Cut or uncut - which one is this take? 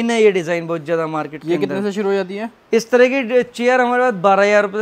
uncut